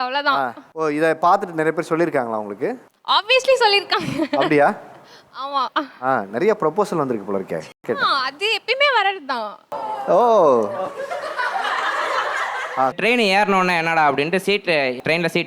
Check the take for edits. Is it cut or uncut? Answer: cut